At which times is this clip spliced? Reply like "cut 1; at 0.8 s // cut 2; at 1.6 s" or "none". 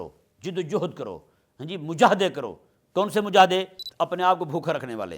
cut 1; at 3.8 s